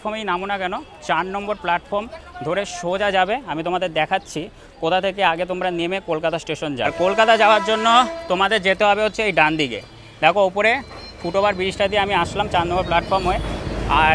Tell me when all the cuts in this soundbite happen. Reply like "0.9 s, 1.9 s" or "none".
6.9 s